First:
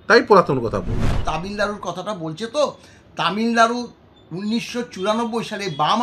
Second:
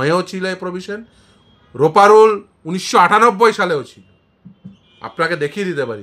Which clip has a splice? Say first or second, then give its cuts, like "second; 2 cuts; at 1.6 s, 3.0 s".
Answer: first; 1 cut; at 1.1 s